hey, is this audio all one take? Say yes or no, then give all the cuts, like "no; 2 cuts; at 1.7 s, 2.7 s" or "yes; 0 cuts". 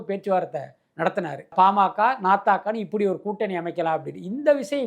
no; 1 cut; at 1.5 s